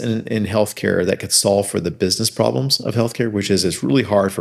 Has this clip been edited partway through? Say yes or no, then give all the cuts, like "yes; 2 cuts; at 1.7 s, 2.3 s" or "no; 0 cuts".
no; 0 cuts